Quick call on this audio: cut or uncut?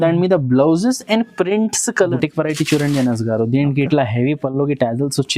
cut